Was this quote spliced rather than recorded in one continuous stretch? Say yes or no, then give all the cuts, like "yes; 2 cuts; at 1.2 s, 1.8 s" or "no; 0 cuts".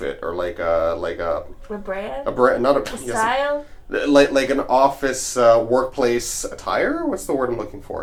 no; 0 cuts